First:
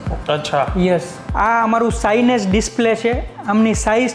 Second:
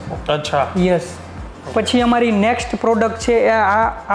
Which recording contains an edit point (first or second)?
first